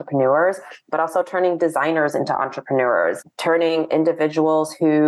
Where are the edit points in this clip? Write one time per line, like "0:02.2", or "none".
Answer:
none